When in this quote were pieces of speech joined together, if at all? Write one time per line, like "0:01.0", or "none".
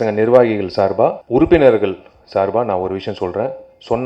0:01.2

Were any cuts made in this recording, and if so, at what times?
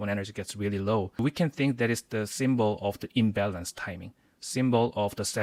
none

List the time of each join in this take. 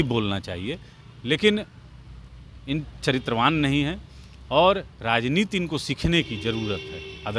none

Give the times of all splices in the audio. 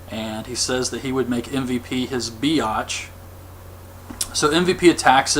0:01.0

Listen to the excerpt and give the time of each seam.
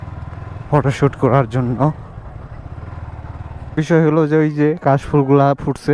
0:03.7

